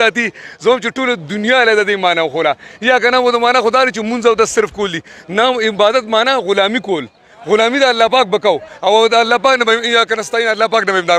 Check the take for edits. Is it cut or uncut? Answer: uncut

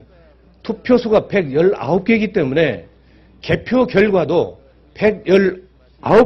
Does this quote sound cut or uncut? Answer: uncut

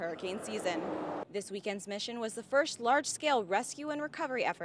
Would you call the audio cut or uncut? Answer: cut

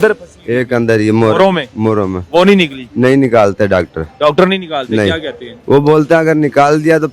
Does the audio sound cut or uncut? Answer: uncut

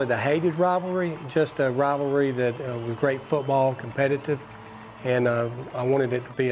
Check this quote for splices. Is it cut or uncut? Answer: uncut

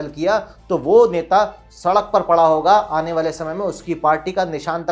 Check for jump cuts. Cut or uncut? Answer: uncut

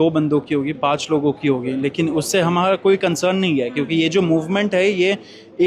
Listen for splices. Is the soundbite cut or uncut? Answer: uncut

